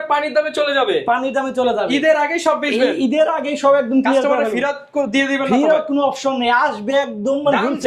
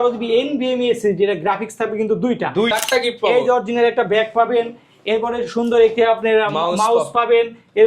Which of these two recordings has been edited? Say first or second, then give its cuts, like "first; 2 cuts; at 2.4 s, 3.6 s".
second; 1 cut; at 2.7 s